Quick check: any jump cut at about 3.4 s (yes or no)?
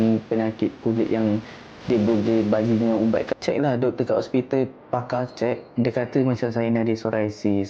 yes